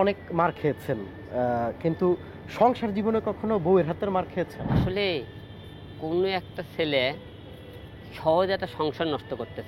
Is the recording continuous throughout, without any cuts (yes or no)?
no